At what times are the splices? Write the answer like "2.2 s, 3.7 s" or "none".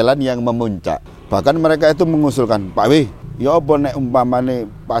1.1 s, 3.2 s